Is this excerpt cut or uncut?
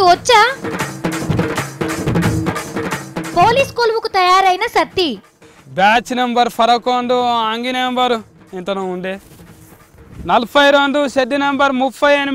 cut